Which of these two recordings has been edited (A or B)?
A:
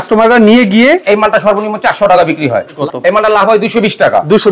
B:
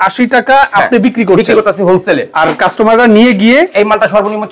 A